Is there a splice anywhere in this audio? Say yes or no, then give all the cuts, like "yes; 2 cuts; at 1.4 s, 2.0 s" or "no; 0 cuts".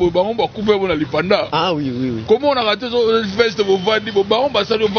no; 0 cuts